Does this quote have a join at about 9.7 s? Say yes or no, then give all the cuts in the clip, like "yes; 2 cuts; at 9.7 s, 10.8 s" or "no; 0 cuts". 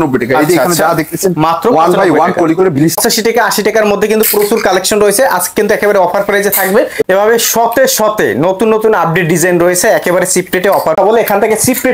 no; 3 cuts; at 3.0 s, 7.0 s, 11.0 s